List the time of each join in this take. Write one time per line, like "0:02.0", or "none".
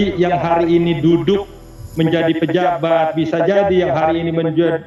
none